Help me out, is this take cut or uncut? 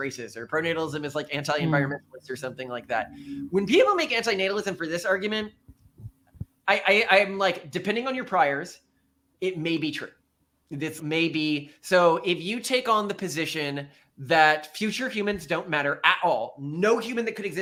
uncut